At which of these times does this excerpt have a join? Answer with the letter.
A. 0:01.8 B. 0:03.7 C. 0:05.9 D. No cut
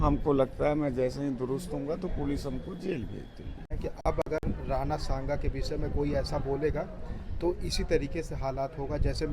B